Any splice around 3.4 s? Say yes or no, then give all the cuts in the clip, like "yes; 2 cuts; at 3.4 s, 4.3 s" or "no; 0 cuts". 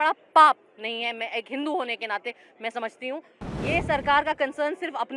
yes; 1 cut; at 3.4 s